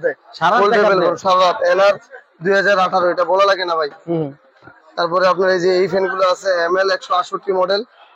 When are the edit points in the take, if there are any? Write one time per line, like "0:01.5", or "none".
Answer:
none